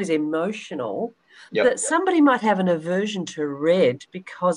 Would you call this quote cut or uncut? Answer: uncut